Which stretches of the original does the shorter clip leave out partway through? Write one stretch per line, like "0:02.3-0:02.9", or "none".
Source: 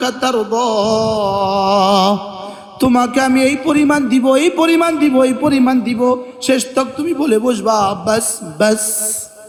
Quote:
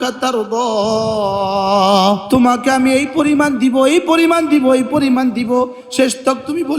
0:02.2-0:02.7